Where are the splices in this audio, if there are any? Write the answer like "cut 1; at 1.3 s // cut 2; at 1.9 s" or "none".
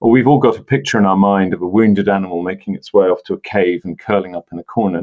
none

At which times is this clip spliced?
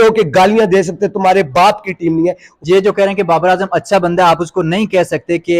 cut 1; at 2.5 s

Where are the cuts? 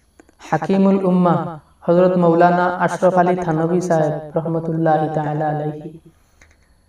none

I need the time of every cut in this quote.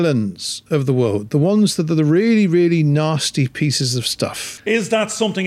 cut 1; at 4.5 s

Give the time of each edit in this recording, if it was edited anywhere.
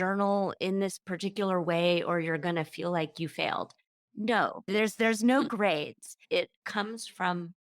cut 1; at 4.7 s

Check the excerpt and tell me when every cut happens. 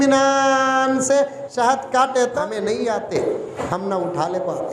cut 1; at 2.4 s // cut 2; at 3.5 s

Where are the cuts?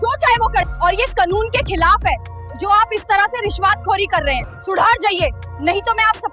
cut 1; at 4.5 s

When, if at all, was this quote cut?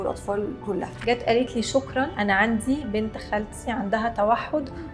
cut 1; at 0.9 s // cut 2; at 2.1 s

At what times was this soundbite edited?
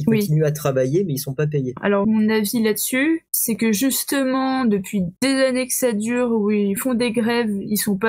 cut 1; at 1.8 s // cut 2; at 3.3 s // cut 3; at 5.1 s // cut 4; at 6.8 s

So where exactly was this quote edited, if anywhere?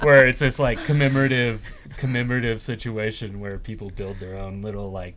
none

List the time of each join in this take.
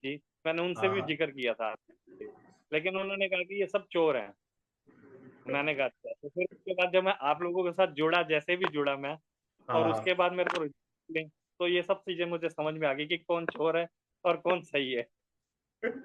none

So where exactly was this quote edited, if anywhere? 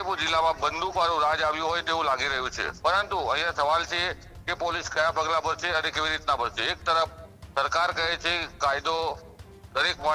cut 1; at 2.6 s

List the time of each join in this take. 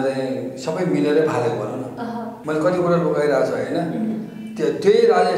cut 1; at 2.3 s

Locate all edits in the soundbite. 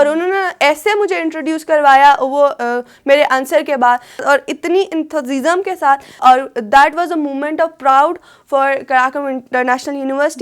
cut 1; at 4.2 s // cut 2; at 6.1 s

